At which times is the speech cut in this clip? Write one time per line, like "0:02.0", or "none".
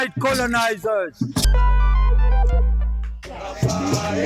none